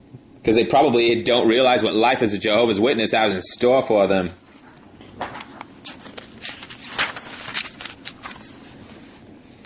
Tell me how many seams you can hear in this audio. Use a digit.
1